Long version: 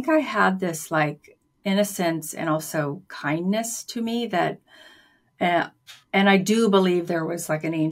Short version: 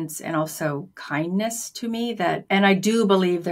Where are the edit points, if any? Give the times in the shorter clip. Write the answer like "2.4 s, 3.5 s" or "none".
2.4 s